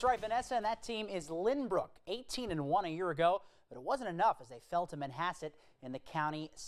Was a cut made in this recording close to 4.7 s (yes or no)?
no